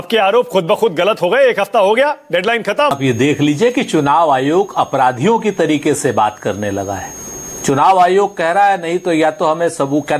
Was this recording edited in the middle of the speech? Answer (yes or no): yes